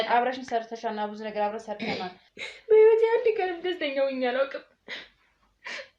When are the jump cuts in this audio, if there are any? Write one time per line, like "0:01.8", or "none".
0:02.3